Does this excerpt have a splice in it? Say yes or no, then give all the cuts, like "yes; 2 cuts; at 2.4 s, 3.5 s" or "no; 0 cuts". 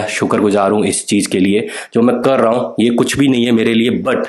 no; 0 cuts